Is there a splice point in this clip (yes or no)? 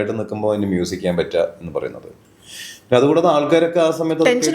no